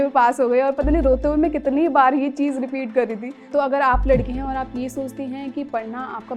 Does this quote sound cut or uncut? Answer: cut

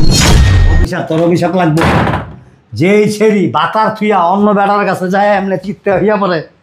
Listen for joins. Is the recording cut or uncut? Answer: cut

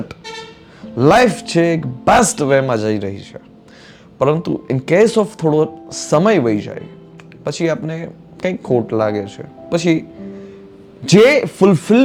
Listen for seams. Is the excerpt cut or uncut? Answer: uncut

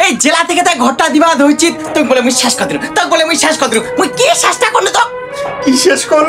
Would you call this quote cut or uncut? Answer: uncut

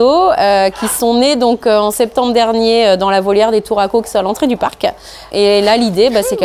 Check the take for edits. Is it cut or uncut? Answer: cut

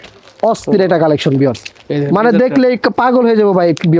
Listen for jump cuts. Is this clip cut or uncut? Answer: uncut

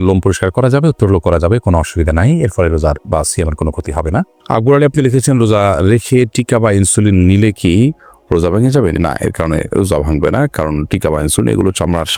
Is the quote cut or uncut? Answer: uncut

